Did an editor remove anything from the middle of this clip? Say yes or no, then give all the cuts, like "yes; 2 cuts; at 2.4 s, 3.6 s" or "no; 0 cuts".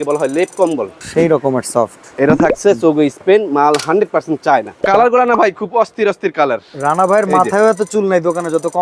yes; 2 cuts; at 1.0 s, 4.8 s